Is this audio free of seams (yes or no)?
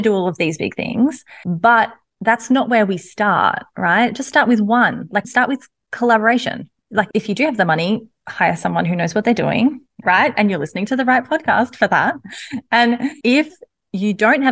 yes